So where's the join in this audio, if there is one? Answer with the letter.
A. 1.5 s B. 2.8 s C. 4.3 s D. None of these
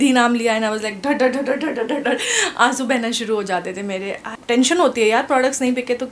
C